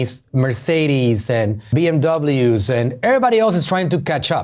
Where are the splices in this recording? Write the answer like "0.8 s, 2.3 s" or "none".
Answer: 1.7 s